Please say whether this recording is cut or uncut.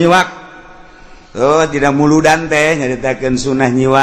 uncut